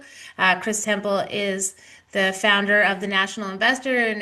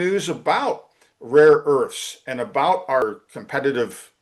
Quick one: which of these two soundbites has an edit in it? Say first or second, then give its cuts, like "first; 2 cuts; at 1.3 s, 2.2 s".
second; 1 cut; at 3.0 s